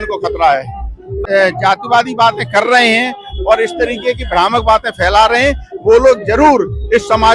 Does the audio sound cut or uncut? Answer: cut